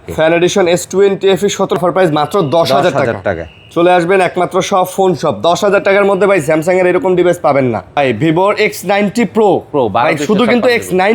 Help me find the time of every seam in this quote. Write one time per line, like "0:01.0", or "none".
0:01.8
0:08.0

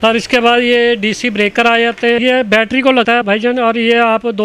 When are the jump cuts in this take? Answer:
0:02.2
0:03.2

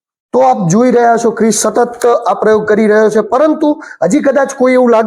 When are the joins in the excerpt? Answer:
none

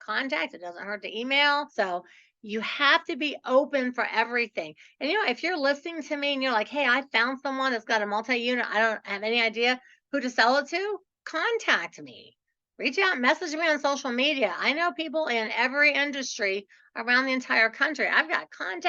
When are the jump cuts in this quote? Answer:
0:01.7

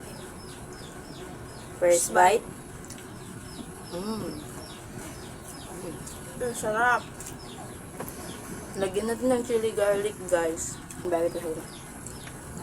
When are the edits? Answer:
0:11.1

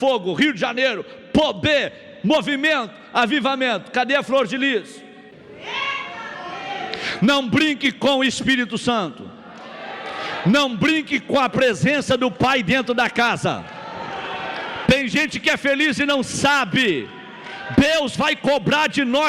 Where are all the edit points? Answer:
0:05.3

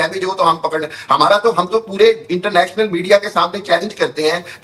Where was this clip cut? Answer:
0:01.2

